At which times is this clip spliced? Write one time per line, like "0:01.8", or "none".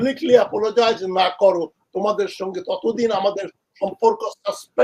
none